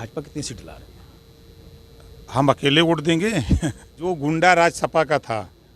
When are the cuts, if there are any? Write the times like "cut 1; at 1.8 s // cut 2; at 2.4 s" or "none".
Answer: cut 1; at 4.0 s